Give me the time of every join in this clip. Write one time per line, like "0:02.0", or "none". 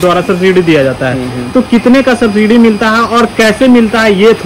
none